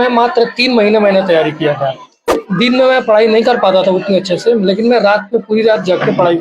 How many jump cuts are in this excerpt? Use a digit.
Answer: 1